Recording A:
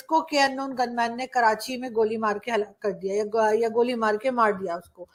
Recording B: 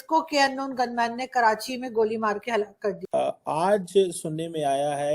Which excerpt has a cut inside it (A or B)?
B